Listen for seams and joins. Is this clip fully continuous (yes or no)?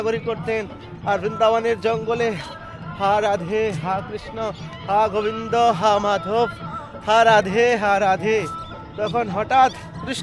yes